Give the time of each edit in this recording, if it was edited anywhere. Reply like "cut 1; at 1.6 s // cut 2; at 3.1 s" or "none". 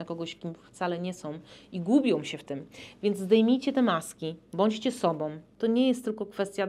cut 1; at 5.4 s